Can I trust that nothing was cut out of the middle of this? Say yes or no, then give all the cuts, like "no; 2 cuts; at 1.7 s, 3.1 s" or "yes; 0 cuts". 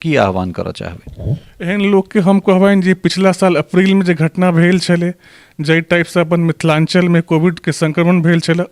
yes; 0 cuts